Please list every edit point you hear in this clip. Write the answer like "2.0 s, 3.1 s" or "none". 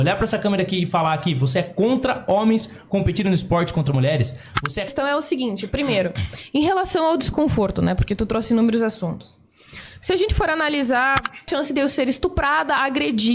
4.9 s, 11.5 s